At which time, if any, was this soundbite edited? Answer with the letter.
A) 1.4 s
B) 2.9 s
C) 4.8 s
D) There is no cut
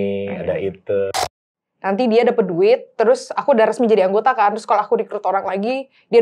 A